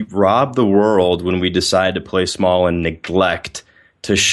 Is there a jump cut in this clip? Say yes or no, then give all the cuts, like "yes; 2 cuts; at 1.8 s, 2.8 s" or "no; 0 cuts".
no; 0 cuts